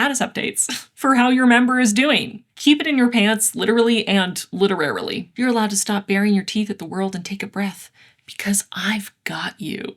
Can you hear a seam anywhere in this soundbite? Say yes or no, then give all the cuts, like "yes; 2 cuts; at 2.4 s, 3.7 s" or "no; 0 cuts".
yes; 2 cuts; at 2.4 s, 5.2 s